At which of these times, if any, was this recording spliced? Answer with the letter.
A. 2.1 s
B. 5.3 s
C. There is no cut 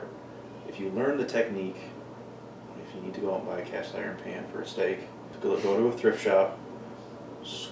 B